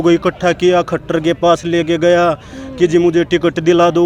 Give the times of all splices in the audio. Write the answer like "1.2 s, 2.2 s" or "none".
none